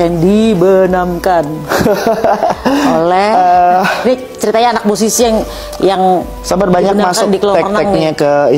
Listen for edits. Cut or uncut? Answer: uncut